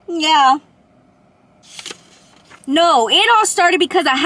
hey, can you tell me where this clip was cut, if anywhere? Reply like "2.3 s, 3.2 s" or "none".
2.6 s